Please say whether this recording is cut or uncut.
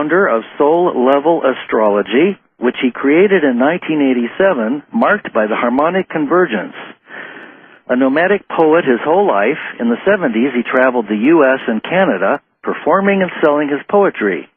cut